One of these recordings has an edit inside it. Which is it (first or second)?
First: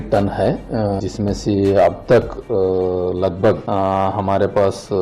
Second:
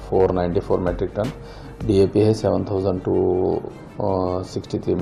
first